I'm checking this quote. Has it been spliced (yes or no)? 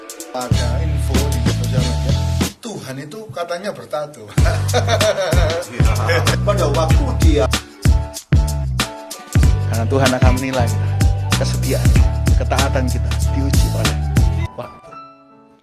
no